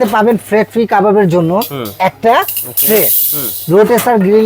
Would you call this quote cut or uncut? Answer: uncut